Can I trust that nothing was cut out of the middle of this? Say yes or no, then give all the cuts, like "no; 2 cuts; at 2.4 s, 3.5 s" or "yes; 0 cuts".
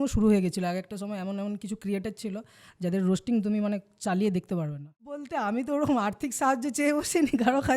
no; 1 cut; at 5.3 s